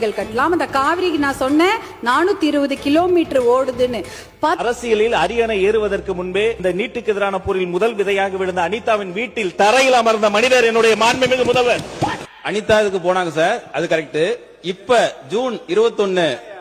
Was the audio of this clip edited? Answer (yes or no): yes